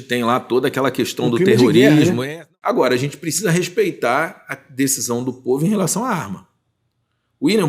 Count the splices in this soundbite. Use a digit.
1